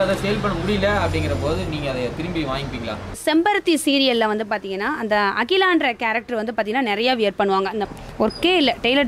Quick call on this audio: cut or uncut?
cut